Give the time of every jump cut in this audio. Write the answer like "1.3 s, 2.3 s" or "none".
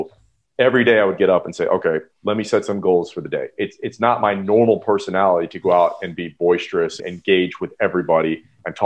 none